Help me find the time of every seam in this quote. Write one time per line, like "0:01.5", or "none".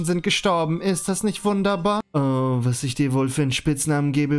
0:02.0